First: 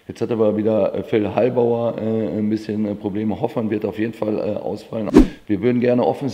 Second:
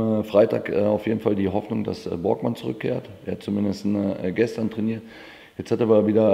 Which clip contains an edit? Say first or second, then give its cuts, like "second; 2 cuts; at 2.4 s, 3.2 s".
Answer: first; 1 cut; at 5.1 s